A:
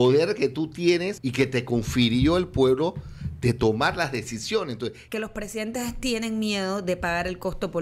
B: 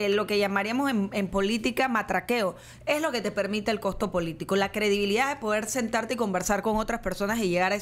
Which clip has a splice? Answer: A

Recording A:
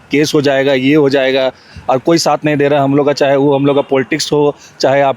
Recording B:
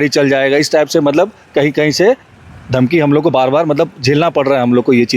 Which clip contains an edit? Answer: A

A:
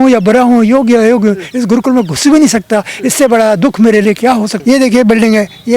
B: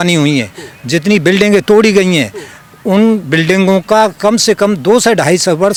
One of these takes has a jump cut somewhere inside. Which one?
A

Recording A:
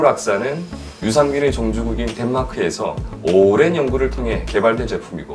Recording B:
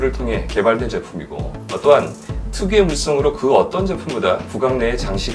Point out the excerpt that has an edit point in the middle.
A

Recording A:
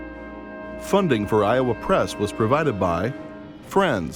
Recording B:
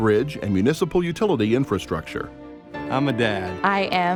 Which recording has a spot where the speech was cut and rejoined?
A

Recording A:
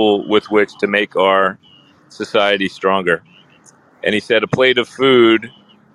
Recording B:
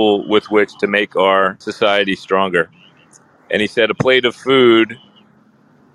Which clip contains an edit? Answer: B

